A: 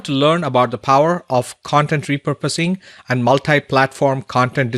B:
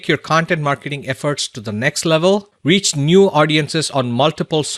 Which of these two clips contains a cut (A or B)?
B